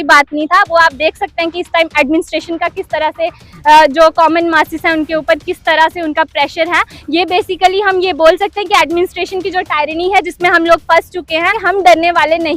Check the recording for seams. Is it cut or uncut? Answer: cut